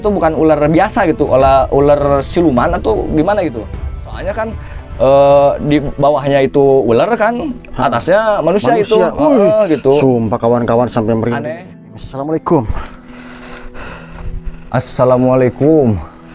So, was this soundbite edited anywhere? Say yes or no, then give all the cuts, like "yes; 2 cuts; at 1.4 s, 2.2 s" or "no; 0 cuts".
yes; 2 cuts; at 3.9 s, 11.9 s